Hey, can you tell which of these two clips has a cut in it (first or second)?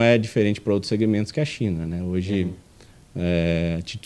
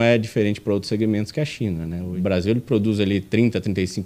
second